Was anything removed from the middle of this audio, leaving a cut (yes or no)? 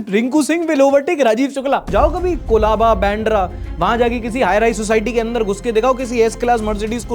yes